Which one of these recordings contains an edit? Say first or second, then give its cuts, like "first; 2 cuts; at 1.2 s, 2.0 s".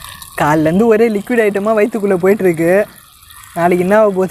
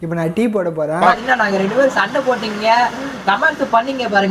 second; 1 cut; at 1.0 s